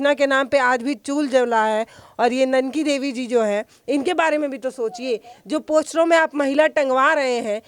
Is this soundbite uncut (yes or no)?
yes